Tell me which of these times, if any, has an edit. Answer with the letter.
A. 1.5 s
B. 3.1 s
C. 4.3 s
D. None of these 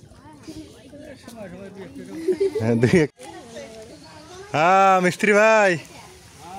B